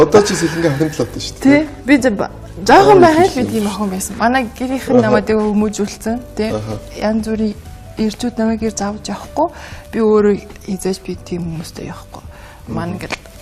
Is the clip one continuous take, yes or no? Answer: no